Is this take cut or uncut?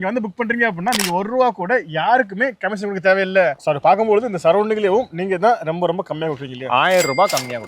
cut